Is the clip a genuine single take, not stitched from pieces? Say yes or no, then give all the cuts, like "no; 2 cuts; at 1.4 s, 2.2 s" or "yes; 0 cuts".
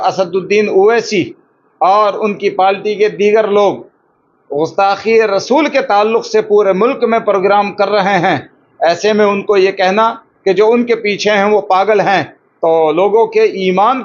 yes; 0 cuts